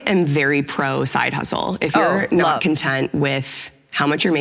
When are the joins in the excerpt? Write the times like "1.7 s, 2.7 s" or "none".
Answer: none